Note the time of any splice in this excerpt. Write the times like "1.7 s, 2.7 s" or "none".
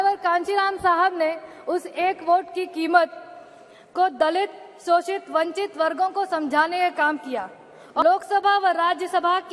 8.0 s